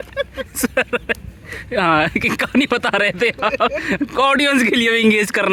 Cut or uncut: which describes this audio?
uncut